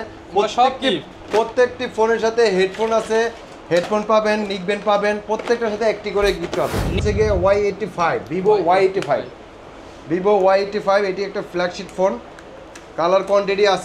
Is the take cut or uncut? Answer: cut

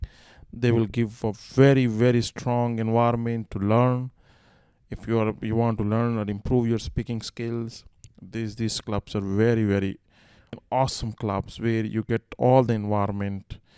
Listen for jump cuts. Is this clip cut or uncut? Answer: cut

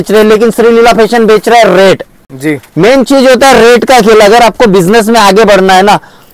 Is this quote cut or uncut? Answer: uncut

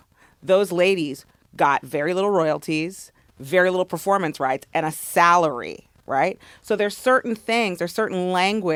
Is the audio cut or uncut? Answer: uncut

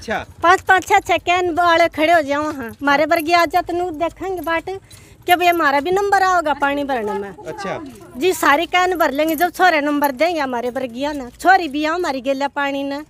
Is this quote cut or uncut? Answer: uncut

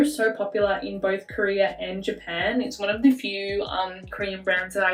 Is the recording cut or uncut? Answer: uncut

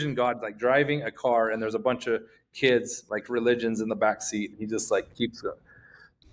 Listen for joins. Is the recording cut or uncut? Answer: uncut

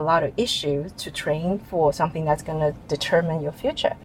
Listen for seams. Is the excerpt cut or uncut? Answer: uncut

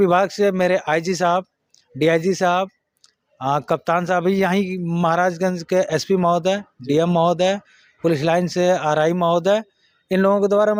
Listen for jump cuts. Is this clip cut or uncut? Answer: uncut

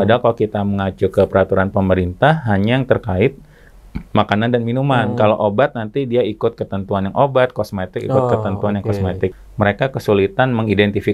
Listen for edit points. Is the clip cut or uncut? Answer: cut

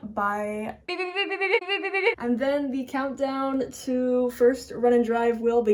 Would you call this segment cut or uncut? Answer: uncut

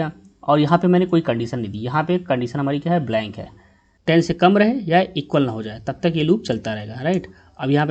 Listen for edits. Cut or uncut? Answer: cut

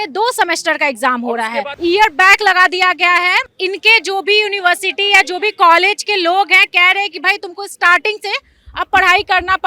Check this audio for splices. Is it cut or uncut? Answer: cut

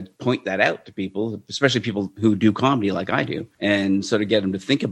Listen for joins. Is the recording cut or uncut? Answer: cut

